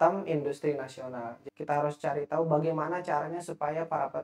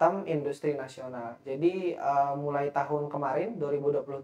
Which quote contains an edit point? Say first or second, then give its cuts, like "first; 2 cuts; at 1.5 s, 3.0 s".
first; 1 cut; at 1.4 s